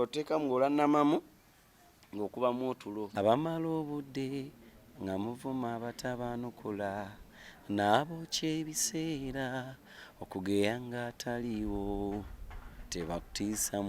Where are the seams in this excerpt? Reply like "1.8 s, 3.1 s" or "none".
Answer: 3.1 s